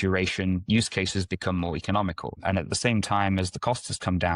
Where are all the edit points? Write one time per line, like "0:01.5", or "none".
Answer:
0:02.3